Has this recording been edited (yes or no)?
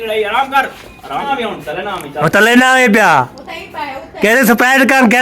yes